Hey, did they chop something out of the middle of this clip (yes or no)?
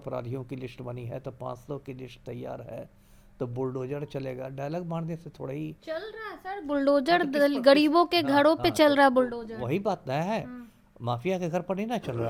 no